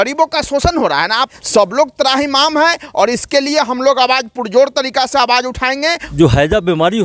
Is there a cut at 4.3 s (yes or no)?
no